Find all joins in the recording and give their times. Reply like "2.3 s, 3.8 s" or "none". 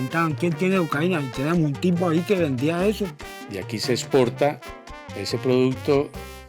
3.3 s